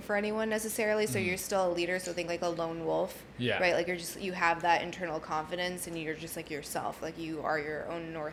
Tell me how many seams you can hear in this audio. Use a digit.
0